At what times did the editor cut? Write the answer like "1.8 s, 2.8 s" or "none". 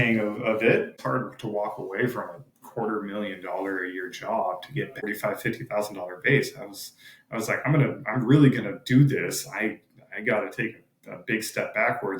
1.0 s, 4.9 s